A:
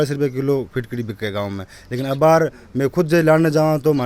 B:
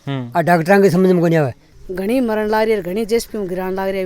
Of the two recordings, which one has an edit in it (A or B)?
B